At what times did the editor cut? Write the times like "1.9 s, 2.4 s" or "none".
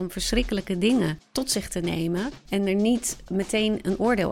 1.3 s, 2.4 s, 3.2 s